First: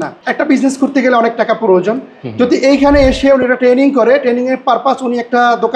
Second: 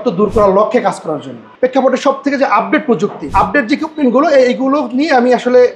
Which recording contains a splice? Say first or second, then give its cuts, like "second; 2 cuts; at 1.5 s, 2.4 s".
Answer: second; 2 cuts; at 1.4 s, 3.2 s